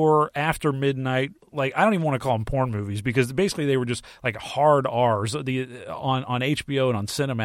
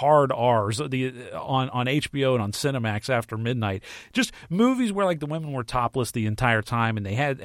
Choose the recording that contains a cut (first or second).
first